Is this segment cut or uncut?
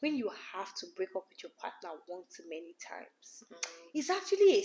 uncut